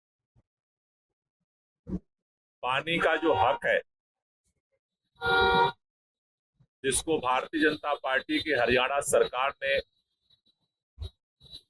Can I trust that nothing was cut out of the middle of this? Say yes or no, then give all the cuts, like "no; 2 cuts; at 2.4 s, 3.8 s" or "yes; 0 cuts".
yes; 0 cuts